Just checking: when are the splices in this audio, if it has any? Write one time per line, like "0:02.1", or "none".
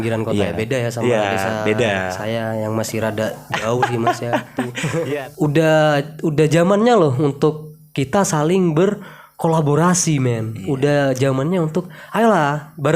0:05.0